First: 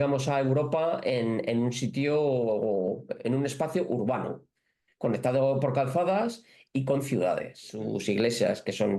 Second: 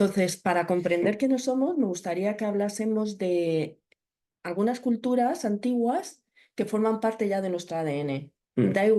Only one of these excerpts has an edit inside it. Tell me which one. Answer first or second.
first